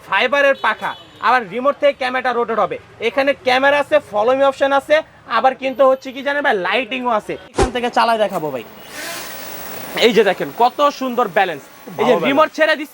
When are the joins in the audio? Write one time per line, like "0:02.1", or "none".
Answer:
0:07.6

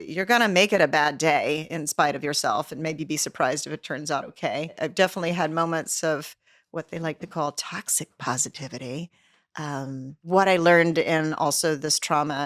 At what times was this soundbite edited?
0:04.8
0:10.2

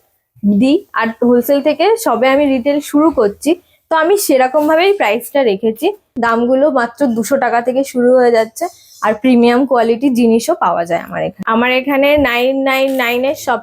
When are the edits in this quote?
0:06.1
0:11.4

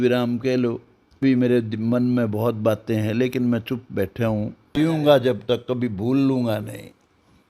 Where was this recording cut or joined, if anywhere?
0:01.2
0:04.7

